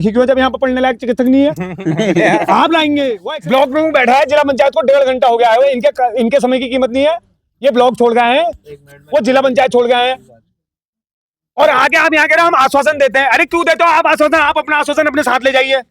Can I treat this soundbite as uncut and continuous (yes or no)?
no